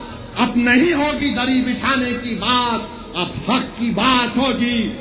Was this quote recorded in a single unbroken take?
yes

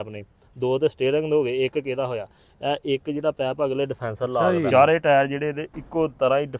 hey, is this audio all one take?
no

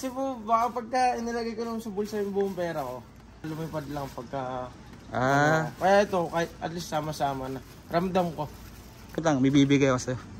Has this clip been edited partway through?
yes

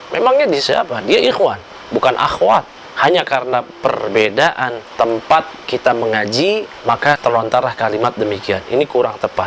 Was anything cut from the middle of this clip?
yes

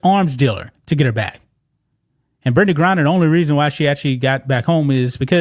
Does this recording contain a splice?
no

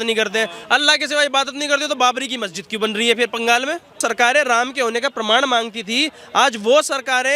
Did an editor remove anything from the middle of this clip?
yes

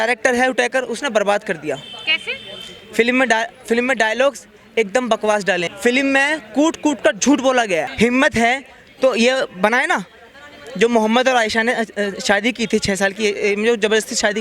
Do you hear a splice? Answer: yes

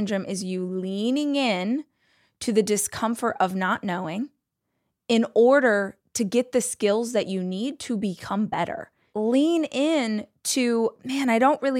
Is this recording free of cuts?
no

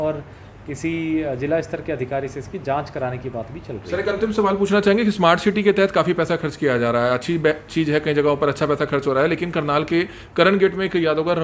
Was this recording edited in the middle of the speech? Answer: no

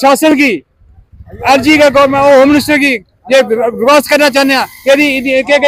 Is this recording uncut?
yes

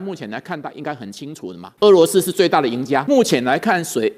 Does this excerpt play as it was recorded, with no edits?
no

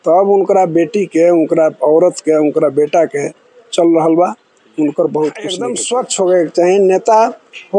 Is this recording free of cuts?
no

